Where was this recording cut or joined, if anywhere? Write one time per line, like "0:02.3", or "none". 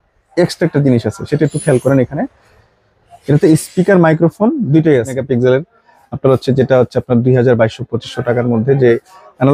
0:05.2